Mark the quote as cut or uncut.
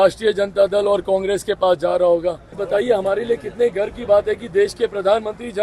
cut